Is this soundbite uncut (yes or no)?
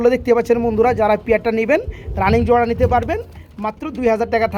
yes